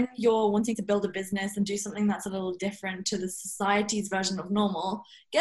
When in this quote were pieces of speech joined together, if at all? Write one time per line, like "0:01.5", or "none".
none